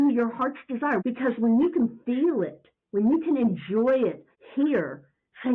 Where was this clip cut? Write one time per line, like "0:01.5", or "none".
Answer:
0:01.0